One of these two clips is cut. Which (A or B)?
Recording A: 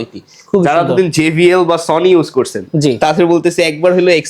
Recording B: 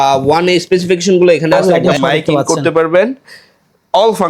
B